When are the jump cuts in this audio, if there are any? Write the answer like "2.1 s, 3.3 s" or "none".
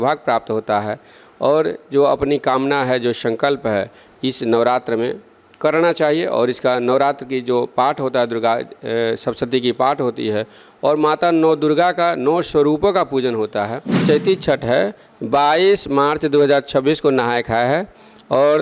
14.0 s